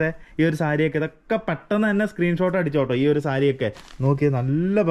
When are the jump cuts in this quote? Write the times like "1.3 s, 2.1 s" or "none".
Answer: 3.9 s

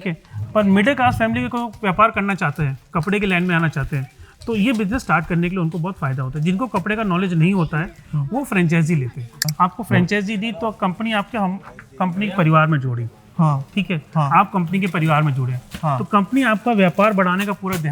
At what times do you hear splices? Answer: 9.5 s

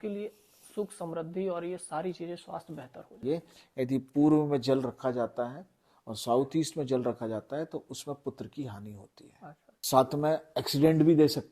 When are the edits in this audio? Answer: 3.2 s, 10.0 s

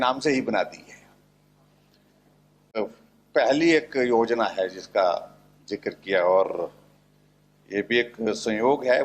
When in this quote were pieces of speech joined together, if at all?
2.8 s

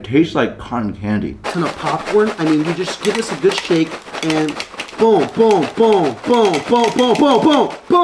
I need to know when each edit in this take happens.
1.4 s

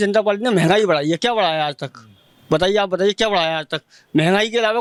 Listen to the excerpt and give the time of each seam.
none

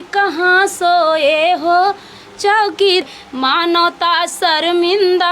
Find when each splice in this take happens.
3.0 s

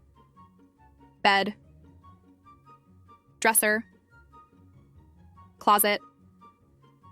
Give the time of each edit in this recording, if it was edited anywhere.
none

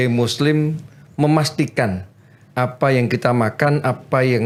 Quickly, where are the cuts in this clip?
none

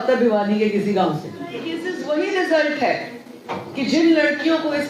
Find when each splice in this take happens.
1.8 s

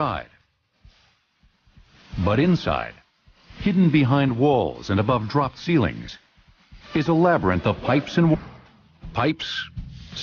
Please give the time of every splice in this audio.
none

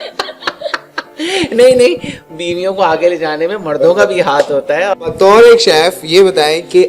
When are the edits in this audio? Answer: 5.1 s

